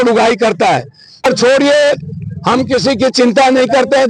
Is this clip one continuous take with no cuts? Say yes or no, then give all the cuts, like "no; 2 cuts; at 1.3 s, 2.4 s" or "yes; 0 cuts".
no; 1 cut; at 1.3 s